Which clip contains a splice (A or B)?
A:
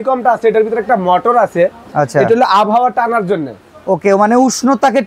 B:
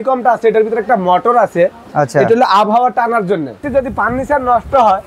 B